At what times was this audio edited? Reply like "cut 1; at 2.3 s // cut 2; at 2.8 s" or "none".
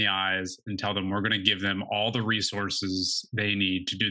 none